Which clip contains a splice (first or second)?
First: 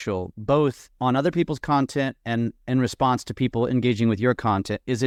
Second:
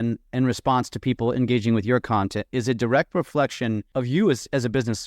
second